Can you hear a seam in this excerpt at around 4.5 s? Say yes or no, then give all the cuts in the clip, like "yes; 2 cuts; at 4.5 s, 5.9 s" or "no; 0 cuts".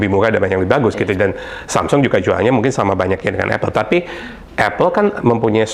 no; 0 cuts